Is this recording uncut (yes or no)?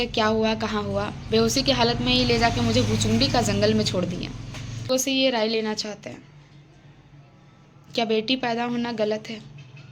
no